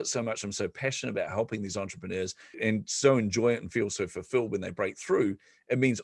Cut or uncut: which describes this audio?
cut